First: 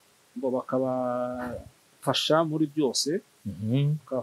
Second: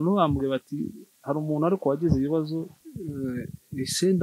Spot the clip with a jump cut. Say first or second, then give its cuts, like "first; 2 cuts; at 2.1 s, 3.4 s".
second; 1 cut; at 2.8 s